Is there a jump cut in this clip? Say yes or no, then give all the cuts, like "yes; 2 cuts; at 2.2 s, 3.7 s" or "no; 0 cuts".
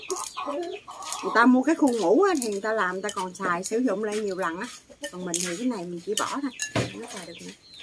no; 0 cuts